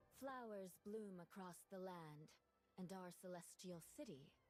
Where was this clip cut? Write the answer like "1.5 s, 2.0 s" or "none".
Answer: none